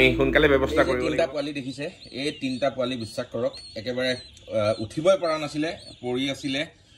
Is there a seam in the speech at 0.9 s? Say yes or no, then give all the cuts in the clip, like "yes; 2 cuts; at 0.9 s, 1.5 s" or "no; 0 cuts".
yes; 1 cut; at 0.9 s